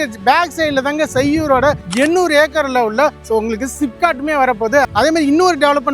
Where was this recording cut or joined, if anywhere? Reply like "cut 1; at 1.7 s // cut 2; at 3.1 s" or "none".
cut 1; at 4.9 s

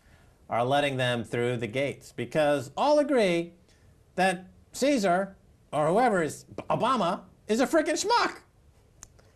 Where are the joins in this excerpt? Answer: none

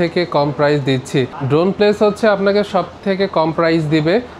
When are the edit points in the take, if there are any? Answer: cut 1; at 1.4 s

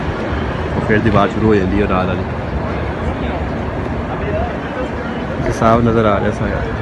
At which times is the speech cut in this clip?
none

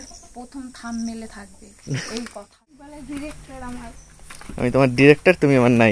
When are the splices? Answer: cut 1; at 2.8 s

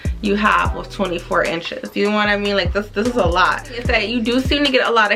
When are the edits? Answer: none

